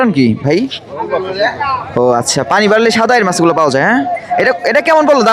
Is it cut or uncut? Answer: uncut